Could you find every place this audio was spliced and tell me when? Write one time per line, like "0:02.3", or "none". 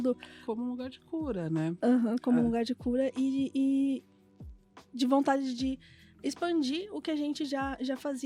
none